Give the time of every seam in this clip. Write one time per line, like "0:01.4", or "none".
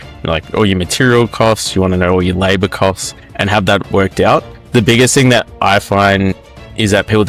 none